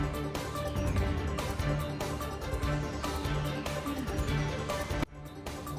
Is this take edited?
no; 0 cuts

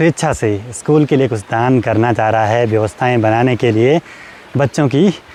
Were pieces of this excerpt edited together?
no; 0 cuts

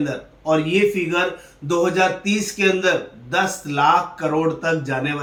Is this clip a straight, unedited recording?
yes; 0 cuts

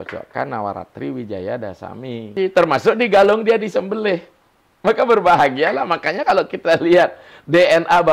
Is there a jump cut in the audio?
yes; 1 cut; at 2.3 s

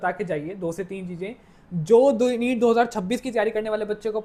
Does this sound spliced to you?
no; 0 cuts

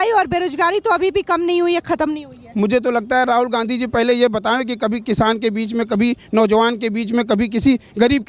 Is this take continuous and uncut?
yes; 0 cuts

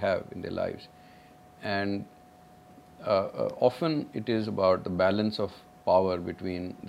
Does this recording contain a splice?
no; 0 cuts

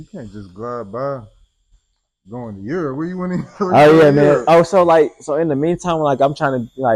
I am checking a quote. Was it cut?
no; 0 cuts

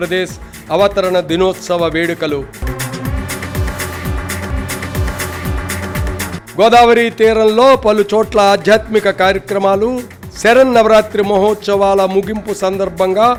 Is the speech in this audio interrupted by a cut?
no; 0 cuts

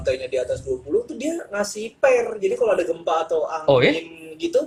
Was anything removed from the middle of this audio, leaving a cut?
no; 0 cuts

